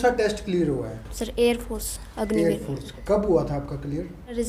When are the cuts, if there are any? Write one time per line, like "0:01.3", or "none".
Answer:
none

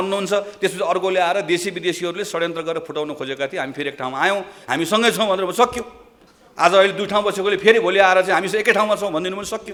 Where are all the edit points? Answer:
none

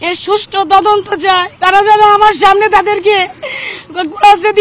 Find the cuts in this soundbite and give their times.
0:01.5

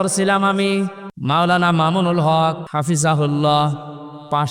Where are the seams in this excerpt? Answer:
0:01.1
0:02.6

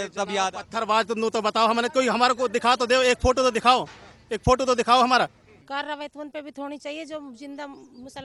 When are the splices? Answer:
0:05.5

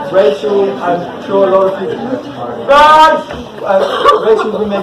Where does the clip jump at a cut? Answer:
0:03.5

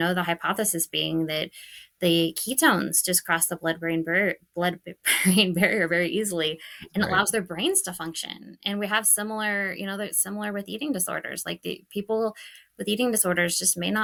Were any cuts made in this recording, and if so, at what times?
none

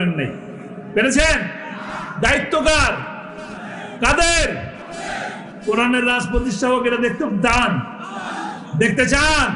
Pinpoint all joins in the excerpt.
none

